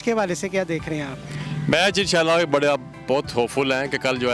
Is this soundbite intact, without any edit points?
yes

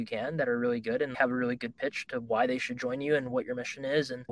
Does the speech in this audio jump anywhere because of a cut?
yes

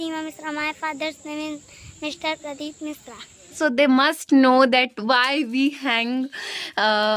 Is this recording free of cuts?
no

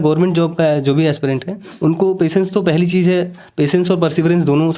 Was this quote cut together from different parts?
no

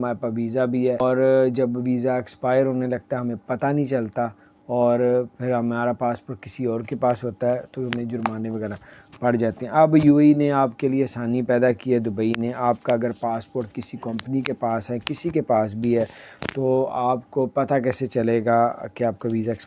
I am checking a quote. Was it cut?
yes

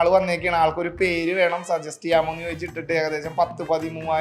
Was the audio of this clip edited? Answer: no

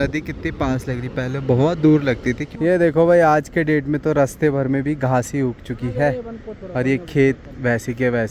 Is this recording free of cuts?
no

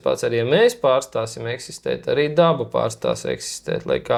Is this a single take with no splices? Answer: yes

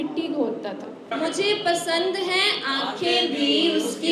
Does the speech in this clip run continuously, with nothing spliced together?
no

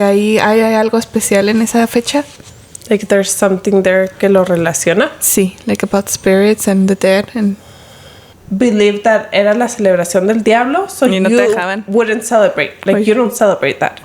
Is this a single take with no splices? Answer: no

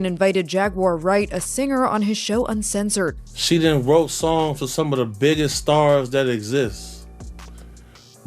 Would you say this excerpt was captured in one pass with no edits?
no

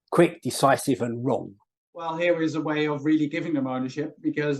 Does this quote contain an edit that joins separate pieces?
yes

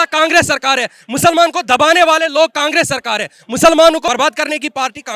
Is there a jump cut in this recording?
no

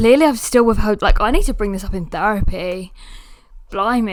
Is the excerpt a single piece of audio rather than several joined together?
yes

